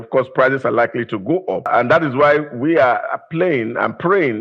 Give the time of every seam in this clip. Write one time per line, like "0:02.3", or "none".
0:01.7